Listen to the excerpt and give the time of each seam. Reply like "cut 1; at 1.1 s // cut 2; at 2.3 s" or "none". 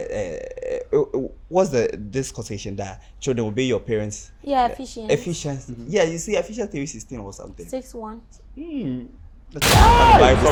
none